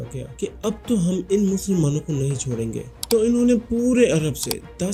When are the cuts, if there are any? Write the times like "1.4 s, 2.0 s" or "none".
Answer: none